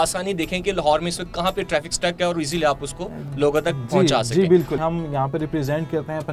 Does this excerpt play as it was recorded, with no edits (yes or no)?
no